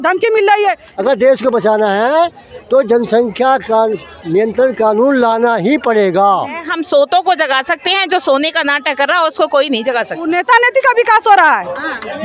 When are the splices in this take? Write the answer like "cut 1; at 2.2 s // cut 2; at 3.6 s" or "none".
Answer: cut 1; at 0.9 s // cut 2; at 6.7 s // cut 3; at 10.3 s